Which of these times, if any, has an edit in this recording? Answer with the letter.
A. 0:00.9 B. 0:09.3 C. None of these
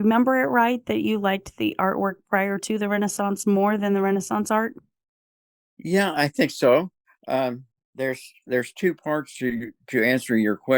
A